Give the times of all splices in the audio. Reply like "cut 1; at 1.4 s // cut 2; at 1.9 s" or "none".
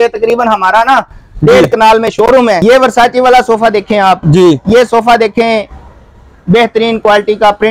cut 1; at 2.6 s